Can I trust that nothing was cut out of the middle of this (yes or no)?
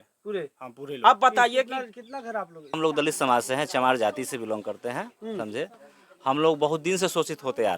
no